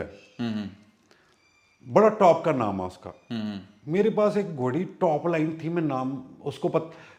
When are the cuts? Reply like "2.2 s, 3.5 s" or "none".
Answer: none